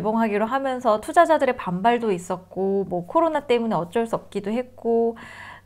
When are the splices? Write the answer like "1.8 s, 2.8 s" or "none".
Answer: none

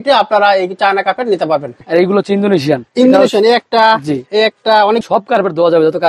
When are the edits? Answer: 1.8 s, 5.0 s

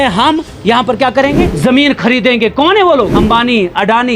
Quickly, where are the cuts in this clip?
1.5 s, 3.2 s

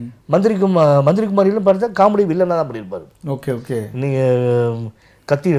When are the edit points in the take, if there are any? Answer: none

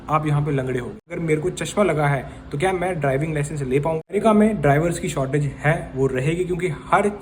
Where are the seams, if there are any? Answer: 1.1 s, 4.0 s

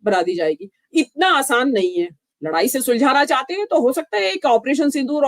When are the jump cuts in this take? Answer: 2.2 s

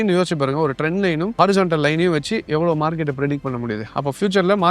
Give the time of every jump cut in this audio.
1.3 s

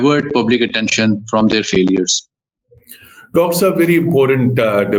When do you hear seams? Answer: none

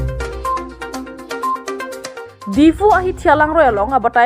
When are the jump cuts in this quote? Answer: 2.1 s

